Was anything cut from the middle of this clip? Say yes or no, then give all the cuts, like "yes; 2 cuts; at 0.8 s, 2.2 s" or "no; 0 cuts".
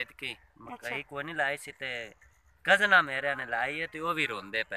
no; 0 cuts